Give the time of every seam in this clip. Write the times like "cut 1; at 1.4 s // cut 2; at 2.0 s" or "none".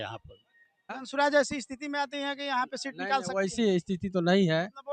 cut 1; at 1.0 s